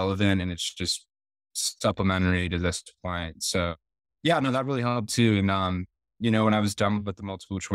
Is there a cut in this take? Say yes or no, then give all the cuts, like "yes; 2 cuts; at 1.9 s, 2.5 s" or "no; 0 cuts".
no; 0 cuts